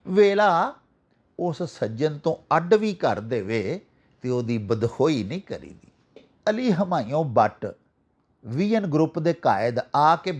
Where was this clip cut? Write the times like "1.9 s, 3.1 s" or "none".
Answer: 6.3 s